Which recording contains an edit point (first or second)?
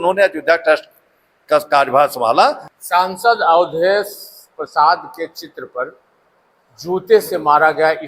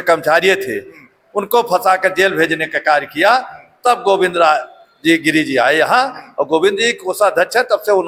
first